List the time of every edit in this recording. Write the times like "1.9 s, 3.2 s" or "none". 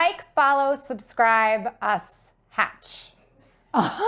none